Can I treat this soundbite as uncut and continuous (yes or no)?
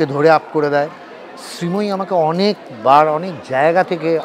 yes